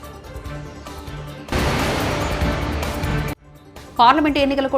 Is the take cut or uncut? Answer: cut